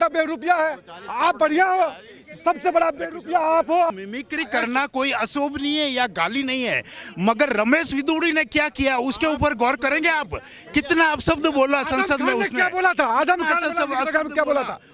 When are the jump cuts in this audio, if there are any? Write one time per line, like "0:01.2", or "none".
0:04.0